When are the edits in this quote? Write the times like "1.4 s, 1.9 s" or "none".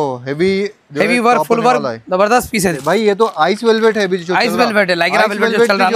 2.6 s